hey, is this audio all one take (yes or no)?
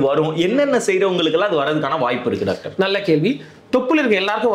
yes